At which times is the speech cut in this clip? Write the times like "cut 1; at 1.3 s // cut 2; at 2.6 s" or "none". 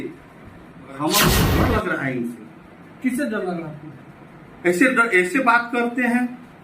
cut 1; at 1.4 s